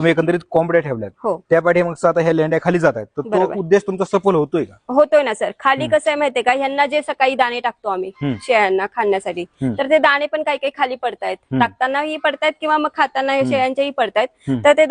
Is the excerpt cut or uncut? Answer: uncut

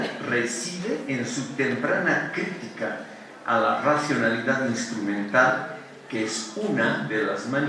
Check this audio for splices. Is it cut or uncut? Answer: cut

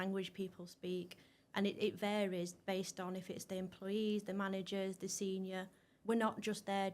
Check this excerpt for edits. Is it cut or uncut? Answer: cut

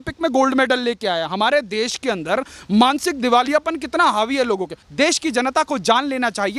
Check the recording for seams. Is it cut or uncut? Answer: cut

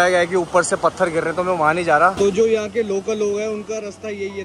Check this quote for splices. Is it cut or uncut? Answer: cut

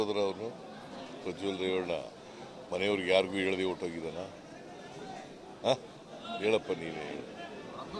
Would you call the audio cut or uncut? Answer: uncut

